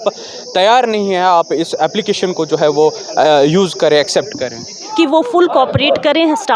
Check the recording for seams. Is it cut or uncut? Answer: cut